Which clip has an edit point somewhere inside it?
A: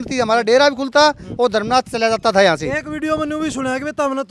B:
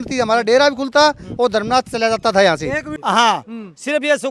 B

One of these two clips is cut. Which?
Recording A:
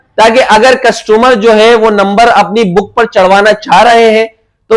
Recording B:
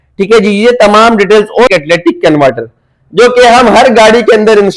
B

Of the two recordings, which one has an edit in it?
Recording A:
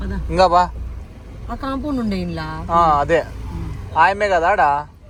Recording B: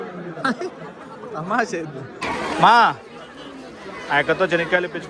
B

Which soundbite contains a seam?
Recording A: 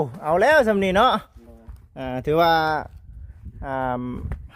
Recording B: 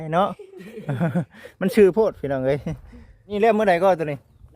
B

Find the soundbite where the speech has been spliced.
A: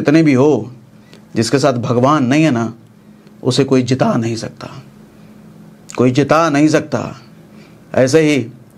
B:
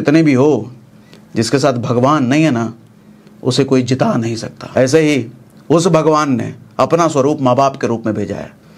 B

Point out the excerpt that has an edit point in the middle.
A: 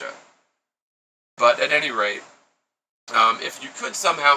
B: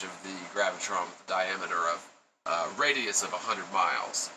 B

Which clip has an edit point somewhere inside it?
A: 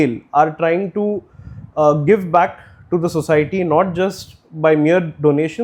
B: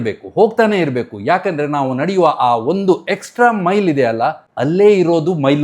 B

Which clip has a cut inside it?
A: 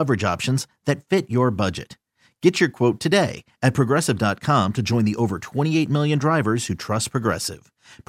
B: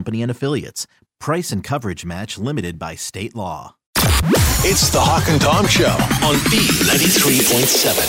B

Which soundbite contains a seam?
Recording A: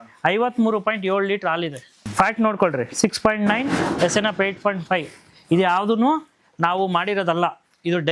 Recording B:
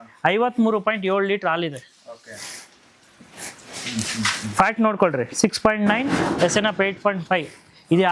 A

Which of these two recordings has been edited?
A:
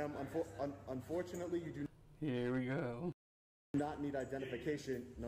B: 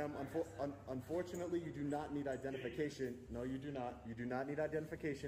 B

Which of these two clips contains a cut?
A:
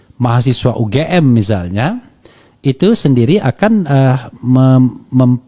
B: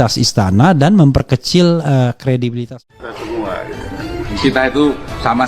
B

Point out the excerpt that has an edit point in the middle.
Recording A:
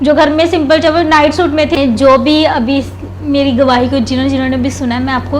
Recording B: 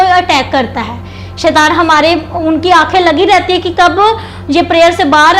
A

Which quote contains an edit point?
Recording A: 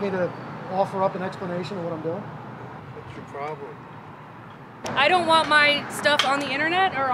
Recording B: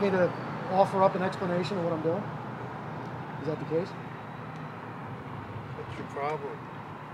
A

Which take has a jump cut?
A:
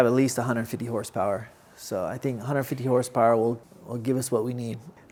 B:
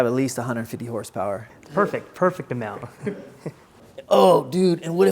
B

